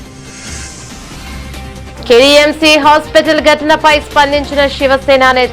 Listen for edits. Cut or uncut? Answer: cut